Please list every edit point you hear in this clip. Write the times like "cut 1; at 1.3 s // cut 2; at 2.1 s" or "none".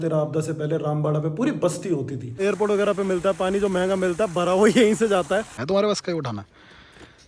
cut 1; at 2.4 s // cut 2; at 5.6 s